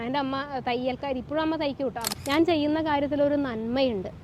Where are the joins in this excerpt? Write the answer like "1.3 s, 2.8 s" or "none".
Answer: 2.1 s